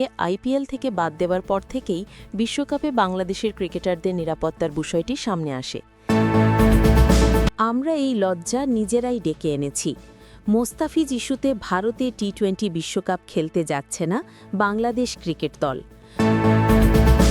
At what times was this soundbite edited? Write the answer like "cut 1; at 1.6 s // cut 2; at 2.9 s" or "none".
cut 1; at 6.0 s // cut 2; at 7.5 s // cut 3; at 16.0 s